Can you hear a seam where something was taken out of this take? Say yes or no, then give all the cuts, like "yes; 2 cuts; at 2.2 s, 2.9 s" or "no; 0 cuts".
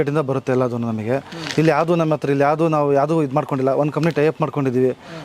no; 0 cuts